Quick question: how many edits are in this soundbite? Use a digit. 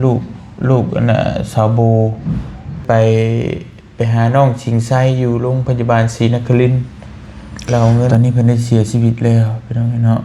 2